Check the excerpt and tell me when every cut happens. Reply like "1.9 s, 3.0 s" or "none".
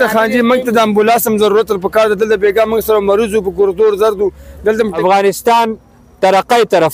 5.0 s